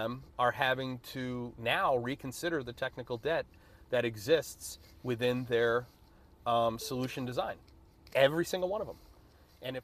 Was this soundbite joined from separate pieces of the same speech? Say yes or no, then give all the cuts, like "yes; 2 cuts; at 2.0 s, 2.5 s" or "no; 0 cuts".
no; 0 cuts